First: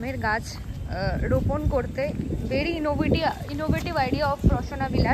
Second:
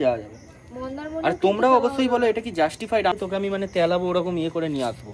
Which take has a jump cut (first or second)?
second